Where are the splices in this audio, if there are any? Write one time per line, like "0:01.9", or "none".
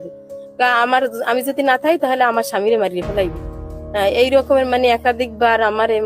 none